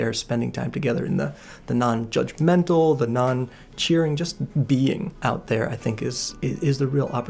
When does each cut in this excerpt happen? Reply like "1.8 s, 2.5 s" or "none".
5.1 s, 6.3 s